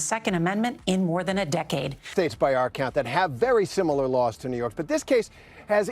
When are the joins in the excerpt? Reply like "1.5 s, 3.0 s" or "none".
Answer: 2.0 s